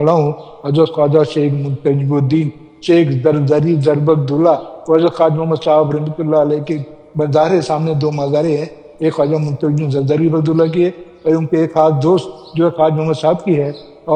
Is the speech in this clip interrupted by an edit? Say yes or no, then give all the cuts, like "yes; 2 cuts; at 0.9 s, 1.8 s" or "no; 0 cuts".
no; 0 cuts